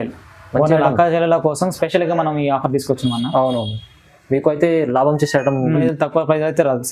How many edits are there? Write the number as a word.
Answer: one